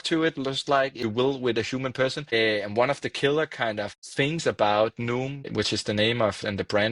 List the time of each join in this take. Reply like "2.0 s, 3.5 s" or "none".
1.0 s, 2.3 s, 4.0 s, 5.5 s